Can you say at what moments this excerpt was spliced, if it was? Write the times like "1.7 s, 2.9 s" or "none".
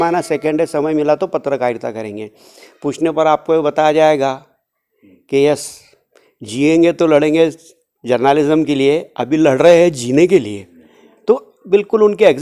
none